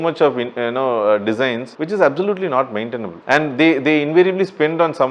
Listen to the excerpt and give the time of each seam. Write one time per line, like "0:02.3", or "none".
0:01.7
0:03.1